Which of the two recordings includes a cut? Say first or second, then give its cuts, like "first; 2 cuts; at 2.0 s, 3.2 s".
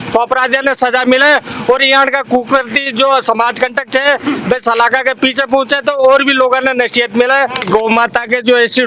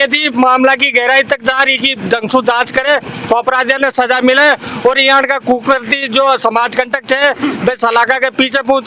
first; 1 cut; at 7.7 s